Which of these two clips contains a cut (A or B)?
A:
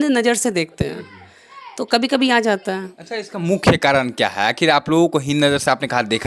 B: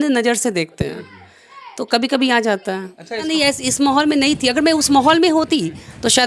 B